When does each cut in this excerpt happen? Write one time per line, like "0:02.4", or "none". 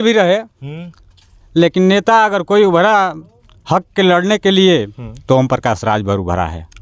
none